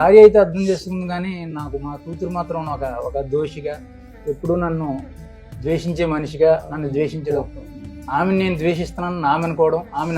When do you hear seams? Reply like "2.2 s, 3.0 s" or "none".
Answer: none